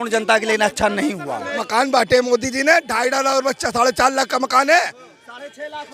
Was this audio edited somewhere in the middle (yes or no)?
yes